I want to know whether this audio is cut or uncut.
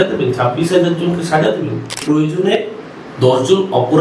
cut